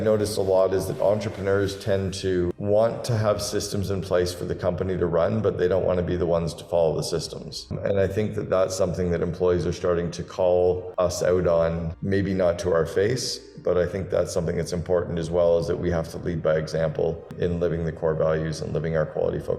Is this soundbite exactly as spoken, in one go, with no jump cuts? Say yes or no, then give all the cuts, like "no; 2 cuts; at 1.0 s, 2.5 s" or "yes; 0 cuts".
no; 2 cuts; at 7.7 s, 10.9 s